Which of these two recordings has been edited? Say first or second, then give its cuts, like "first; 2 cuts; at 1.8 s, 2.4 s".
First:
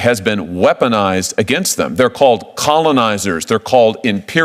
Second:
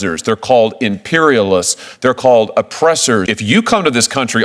second; 1 cut; at 3.3 s